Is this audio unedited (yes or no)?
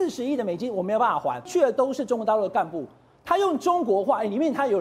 no